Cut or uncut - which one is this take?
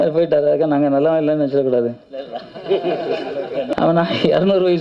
cut